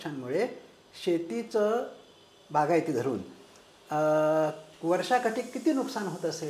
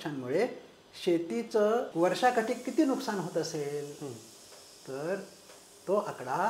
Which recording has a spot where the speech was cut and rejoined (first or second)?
second